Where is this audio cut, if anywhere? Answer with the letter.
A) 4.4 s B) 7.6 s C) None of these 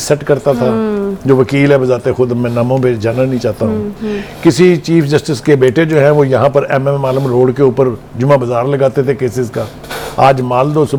C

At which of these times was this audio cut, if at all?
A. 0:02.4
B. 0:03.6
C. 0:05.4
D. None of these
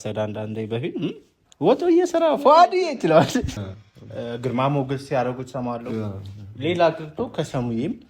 B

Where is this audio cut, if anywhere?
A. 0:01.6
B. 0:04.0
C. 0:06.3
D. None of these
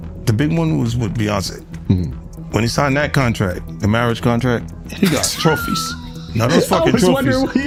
D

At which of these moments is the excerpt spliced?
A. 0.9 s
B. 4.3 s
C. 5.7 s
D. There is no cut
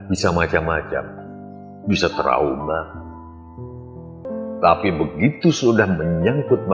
B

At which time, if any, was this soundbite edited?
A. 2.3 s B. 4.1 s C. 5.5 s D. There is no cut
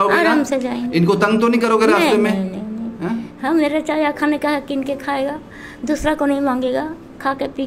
D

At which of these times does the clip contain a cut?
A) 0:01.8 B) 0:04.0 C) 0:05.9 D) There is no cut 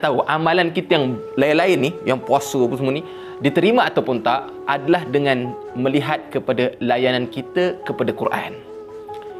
D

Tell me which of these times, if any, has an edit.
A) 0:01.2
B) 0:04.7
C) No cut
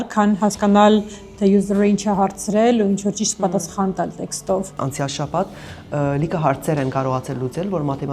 B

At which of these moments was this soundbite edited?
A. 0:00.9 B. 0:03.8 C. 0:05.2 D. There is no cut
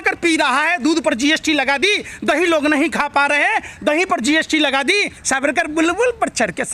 C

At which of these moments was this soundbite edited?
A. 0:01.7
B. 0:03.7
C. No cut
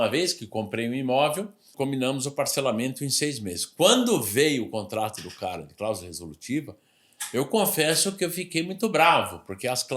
A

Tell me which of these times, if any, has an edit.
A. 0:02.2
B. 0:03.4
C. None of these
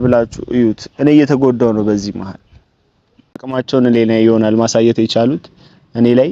B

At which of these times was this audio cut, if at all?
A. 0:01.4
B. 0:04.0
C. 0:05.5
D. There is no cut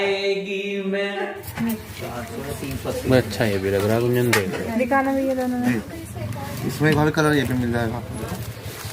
A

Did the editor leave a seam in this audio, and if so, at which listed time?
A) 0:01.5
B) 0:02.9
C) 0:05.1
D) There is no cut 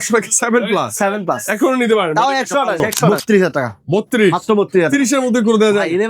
B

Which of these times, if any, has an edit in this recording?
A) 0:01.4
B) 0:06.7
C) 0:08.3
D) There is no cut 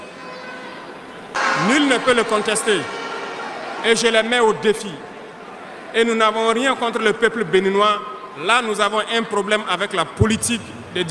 A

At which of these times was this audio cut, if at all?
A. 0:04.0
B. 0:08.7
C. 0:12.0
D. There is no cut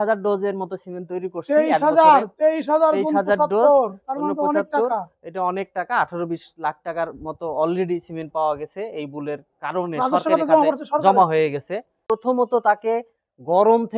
C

